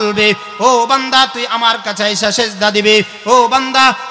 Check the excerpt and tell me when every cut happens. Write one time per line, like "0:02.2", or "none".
none